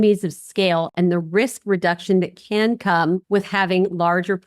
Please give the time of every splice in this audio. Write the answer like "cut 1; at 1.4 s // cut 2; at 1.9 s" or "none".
cut 1; at 3.2 s